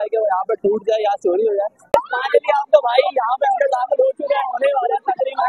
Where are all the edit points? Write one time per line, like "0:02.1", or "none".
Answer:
0:02.2